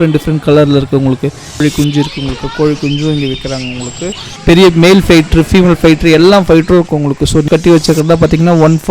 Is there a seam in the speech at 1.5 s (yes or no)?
yes